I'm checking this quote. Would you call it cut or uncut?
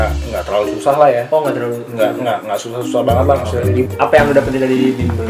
cut